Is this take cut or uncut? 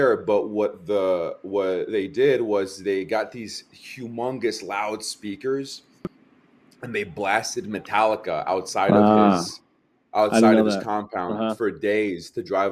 uncut